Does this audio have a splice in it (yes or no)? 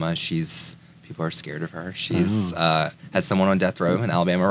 no